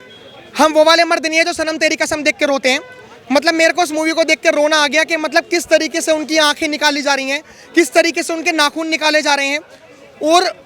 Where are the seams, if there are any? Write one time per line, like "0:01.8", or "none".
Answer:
none